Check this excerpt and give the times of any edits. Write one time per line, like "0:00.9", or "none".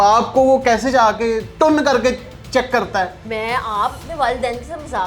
0:01.5
0:03.2